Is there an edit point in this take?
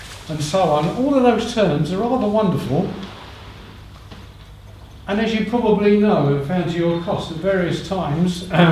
no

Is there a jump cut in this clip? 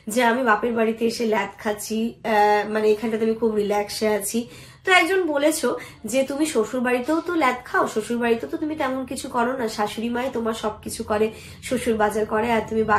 no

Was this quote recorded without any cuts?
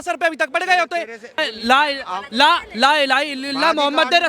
no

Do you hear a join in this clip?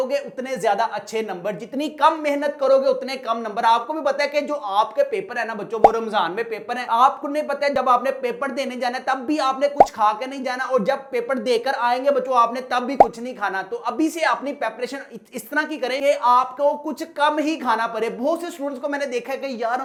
no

